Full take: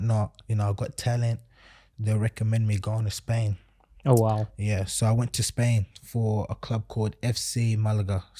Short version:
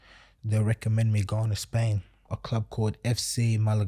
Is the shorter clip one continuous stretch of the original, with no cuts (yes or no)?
no